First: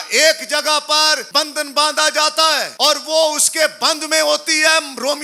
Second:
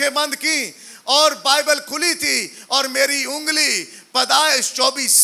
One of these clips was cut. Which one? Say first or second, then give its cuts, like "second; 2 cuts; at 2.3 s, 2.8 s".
first; 2 cuts; at 1.2 s, 2.7 s